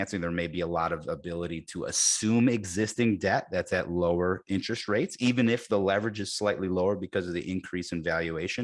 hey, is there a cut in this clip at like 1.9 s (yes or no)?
no